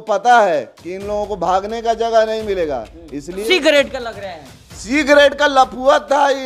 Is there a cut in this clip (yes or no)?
yes